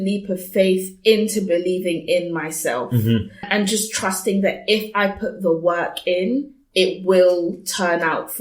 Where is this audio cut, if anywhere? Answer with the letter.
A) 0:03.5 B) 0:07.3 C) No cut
A